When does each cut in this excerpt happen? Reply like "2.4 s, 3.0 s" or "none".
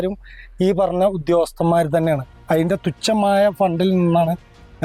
none